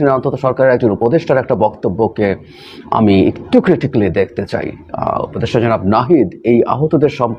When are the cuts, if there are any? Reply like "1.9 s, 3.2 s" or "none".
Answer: none